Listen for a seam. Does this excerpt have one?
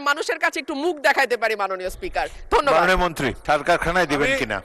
yes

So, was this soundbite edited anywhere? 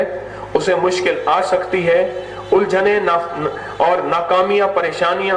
no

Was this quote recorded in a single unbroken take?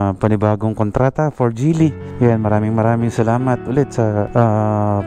no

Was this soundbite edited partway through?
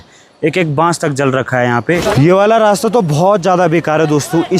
yes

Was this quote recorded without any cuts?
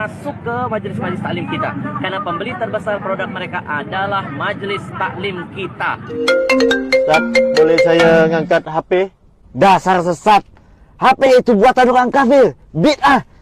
no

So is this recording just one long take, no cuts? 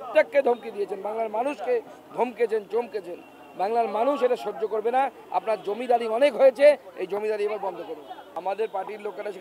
yes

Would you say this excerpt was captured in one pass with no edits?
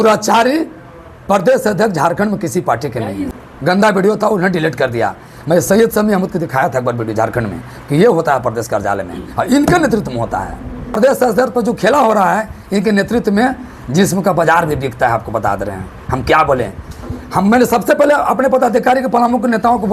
yes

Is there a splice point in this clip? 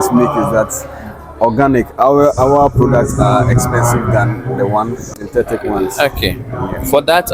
yes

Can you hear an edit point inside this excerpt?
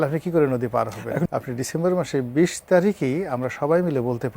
yes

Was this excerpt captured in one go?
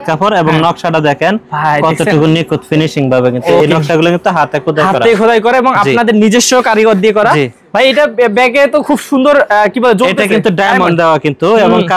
yes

